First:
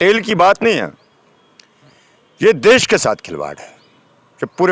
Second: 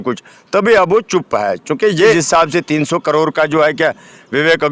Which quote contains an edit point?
second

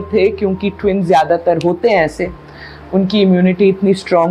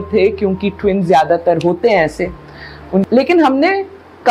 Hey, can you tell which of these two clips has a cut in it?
second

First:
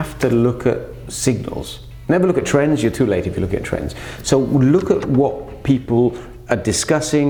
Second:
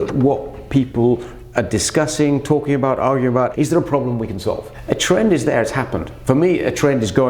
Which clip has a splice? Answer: second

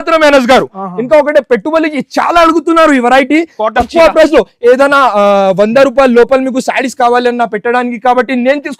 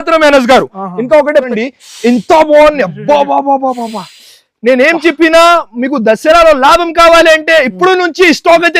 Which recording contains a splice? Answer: second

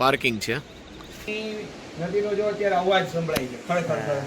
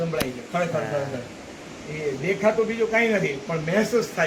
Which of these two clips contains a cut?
first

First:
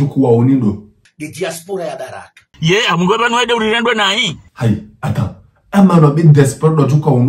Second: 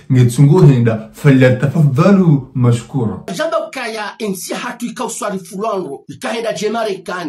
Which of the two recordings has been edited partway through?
second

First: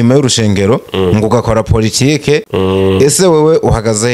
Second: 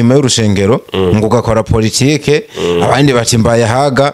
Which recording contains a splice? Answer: first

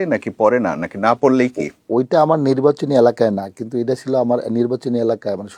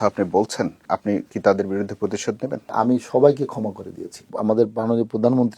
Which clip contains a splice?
second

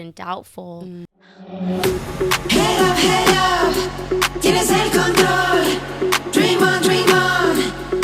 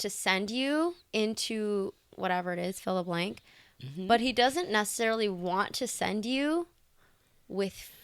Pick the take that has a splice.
first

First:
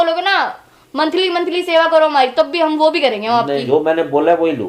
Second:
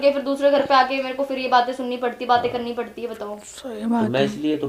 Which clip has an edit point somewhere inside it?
first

